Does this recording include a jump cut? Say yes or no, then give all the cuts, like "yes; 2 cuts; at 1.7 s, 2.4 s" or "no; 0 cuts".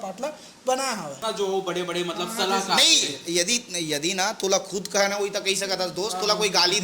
yes; 1 cut; at 1.2 s